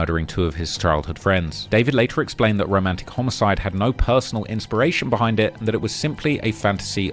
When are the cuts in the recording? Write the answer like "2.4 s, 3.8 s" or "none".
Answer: 2.2 s